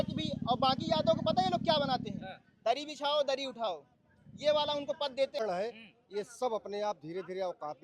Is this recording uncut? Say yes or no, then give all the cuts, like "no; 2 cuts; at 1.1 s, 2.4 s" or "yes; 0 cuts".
no; 1 cut; at 5.4 s